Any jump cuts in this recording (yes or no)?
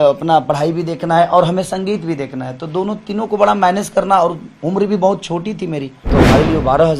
yes